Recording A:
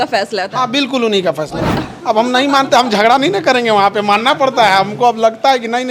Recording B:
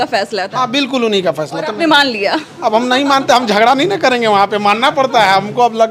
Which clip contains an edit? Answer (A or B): A